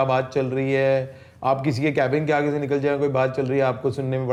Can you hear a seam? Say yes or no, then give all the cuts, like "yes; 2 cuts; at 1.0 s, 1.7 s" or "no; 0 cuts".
no; 0 cuts